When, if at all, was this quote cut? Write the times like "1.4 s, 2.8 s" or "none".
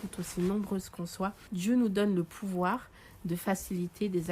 1.4 s